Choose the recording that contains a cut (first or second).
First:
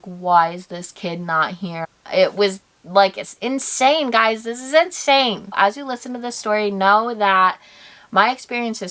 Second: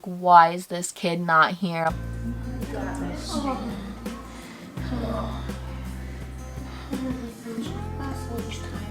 first